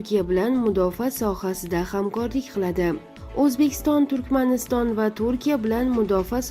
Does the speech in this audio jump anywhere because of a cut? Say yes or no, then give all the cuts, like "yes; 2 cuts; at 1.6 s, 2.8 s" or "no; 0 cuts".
no; 0 cuts